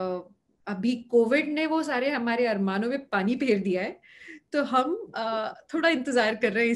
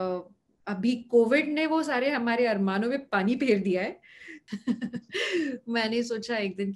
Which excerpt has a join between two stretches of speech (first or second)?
second